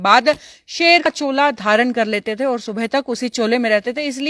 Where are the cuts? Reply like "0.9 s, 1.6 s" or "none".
1.1 s